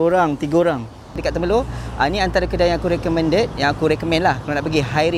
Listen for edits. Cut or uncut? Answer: cut